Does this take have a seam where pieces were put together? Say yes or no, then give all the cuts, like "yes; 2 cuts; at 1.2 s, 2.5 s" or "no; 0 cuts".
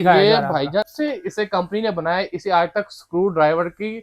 yes; 1 cut; at 0.9 s